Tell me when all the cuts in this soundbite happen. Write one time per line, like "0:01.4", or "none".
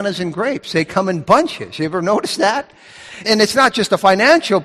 0:03.2